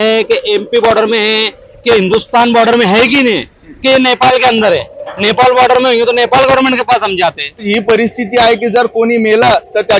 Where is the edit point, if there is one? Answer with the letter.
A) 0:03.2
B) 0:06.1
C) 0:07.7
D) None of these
C